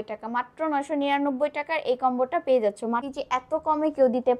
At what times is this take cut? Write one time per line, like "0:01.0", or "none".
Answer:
0:03.0